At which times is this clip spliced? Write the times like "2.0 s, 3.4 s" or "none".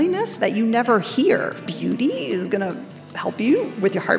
1.6 s